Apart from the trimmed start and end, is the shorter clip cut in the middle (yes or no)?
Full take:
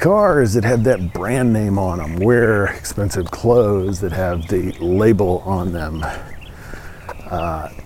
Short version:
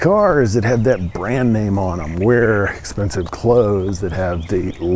no